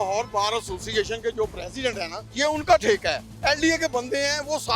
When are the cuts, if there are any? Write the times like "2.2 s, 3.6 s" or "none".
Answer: 2.2 s, 3.3 s